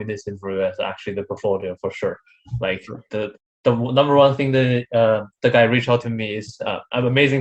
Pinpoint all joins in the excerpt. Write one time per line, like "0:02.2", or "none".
none